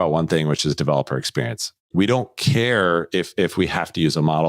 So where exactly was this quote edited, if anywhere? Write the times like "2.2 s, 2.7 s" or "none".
1.9 s